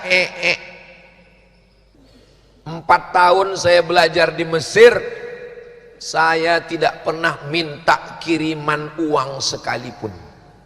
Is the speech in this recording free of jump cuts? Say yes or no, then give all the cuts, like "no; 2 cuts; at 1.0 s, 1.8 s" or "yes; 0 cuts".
no; 1 cut; at 1.9 s